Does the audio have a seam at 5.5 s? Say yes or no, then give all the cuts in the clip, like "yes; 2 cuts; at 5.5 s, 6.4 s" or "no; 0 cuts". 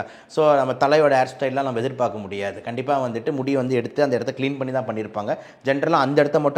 no; 0 cuts